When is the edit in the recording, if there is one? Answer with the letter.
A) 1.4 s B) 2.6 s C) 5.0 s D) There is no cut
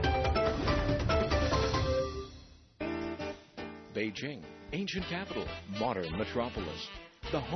A